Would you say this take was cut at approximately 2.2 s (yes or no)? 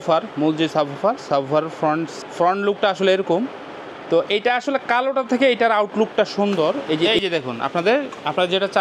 yes